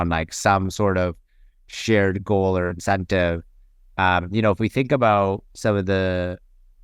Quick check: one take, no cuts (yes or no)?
yes